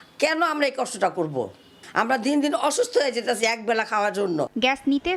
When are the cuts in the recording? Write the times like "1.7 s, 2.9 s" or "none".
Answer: none